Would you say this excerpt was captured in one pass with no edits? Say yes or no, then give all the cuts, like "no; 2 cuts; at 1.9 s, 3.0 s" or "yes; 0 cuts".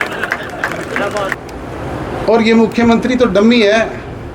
no; 1 cut; at 1.3 s